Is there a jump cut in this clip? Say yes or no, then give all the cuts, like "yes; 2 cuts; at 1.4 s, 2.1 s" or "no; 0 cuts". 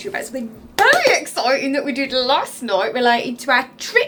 no; 0 cuts